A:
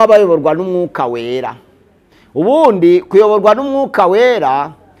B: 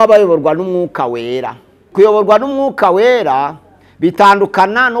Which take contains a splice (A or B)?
B